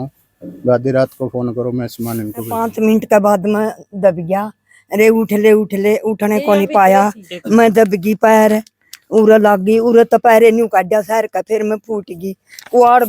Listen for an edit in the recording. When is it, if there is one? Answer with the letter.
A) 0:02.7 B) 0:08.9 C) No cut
A